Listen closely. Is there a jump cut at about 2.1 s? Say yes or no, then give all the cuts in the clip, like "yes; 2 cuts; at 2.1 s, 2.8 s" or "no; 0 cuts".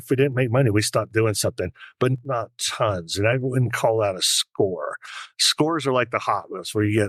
yes; 1 cut; at 2.1 s